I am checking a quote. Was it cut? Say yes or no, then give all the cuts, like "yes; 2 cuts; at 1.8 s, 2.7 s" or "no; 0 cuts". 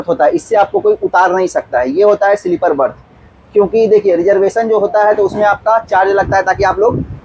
no; 0 cuts